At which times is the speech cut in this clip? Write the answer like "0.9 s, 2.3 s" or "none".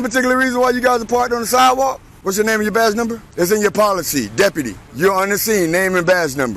2.1 s, 3.2 s, 4.8 s